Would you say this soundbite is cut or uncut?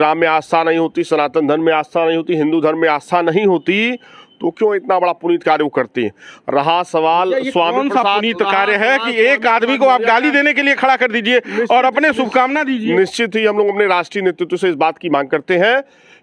uncut